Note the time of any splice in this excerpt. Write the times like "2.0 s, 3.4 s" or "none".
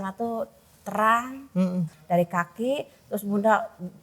2.0 s